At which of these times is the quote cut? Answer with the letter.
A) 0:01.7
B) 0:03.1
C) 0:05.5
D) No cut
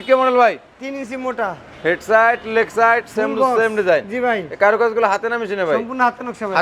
D